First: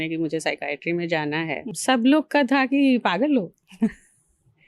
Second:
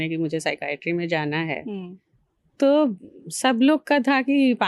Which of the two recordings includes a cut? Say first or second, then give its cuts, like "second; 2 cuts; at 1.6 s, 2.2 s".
first; 1 cut; at 1.6 s